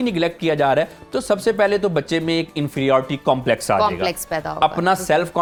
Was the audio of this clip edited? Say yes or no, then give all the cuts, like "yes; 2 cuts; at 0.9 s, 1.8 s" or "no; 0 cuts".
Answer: no; 0 cuts